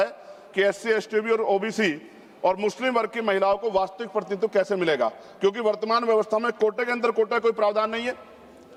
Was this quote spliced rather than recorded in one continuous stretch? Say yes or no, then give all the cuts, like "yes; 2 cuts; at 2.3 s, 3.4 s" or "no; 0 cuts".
no; 0 cuts